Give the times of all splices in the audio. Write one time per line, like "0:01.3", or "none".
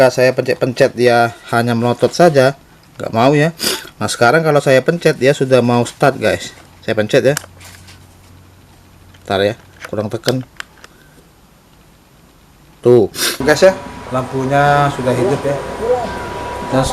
0:13.4